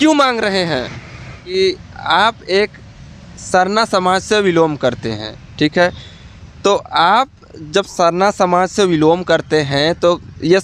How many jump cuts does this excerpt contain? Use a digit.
1